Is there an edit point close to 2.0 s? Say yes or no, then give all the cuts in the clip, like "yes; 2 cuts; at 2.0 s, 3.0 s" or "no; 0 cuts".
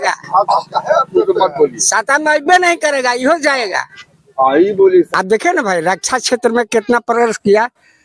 no; 1 cut; at 5.1 s